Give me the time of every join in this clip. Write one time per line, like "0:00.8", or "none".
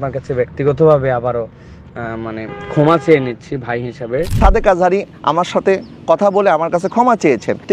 0:04.3